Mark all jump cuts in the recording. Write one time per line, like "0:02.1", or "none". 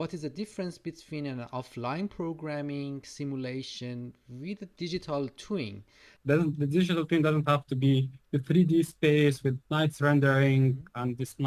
0:06.1